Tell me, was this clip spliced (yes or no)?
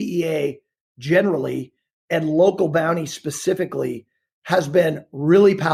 no